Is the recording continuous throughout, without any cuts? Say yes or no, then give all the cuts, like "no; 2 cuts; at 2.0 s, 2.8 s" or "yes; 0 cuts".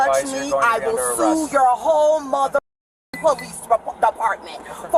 yes; 0 cuts